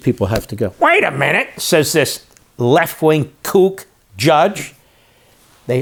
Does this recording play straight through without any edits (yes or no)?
yes